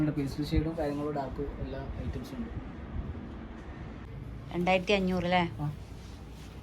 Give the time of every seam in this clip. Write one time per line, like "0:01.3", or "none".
0:04.1